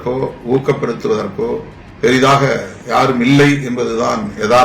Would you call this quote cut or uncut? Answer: cut